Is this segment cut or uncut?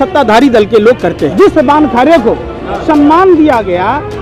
cut